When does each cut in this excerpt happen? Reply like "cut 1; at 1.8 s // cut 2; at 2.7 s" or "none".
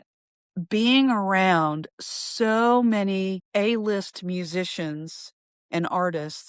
cut 1; at 3.4 s